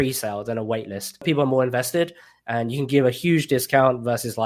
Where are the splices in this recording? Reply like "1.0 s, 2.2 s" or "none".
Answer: 1.2 s